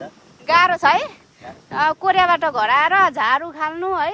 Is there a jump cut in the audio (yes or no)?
no